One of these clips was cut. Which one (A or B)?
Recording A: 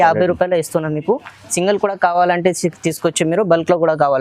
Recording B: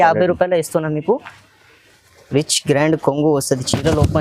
B